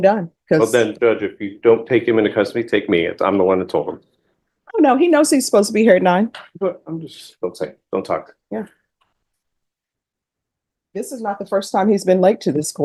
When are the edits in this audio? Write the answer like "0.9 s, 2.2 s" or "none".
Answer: none

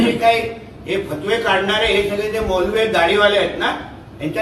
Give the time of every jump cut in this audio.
none

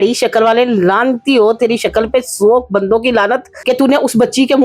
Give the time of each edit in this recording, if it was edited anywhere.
3.5 s

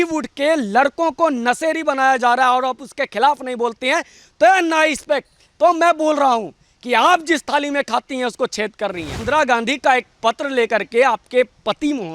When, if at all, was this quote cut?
9.1 s

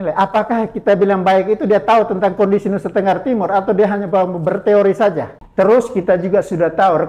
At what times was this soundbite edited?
5.3 s

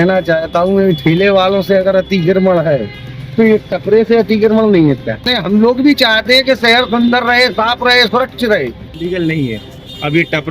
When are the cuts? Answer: 5.3 s, 9.0 s

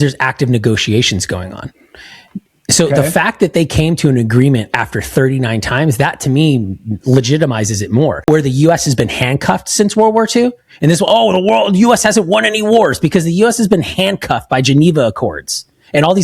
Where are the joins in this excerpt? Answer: 8.2 s

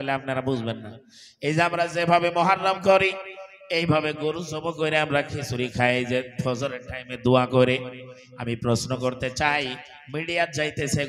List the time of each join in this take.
none

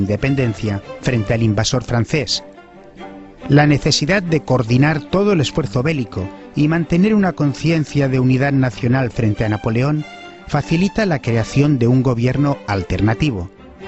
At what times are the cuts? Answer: none

